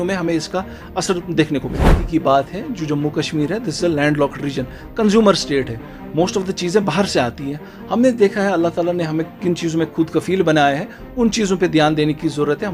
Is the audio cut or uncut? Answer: cut